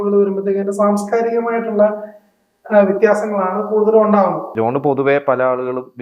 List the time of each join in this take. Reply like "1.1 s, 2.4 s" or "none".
4.5 s